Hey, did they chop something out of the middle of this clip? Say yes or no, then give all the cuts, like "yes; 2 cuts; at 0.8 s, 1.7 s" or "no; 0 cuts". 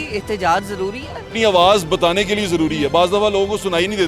yes; 1 cut; at 1.3 s